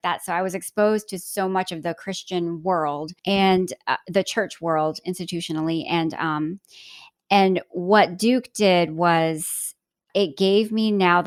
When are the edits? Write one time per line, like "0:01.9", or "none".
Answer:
none

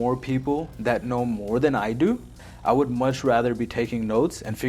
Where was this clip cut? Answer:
0:02.4

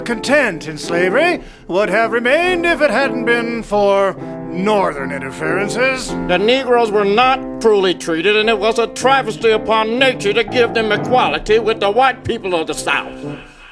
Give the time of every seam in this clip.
none

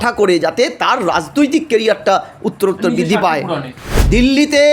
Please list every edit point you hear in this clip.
0:03.8

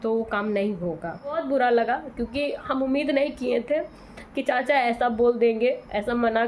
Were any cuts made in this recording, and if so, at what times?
0:01.4

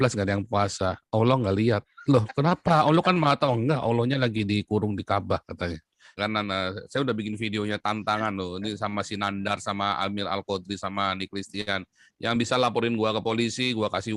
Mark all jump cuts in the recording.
0:06.2

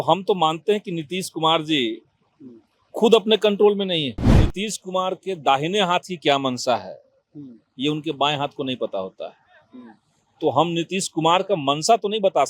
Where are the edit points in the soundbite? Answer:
0:04.3

